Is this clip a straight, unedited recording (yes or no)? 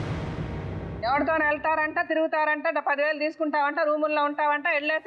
no